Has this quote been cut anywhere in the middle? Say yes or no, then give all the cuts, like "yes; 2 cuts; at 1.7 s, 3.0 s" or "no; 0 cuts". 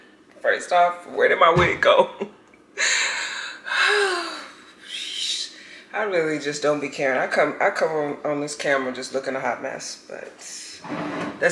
no; 0 cuts